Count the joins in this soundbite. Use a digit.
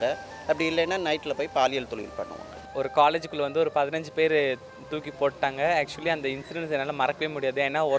1